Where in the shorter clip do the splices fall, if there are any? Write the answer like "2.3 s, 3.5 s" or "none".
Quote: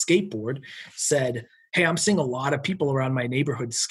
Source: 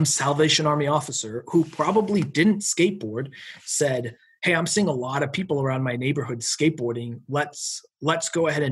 none